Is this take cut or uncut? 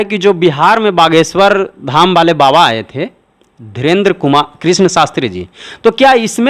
uncut